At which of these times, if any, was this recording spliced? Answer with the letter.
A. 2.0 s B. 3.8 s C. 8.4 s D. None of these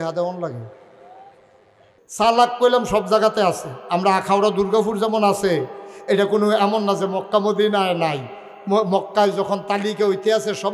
A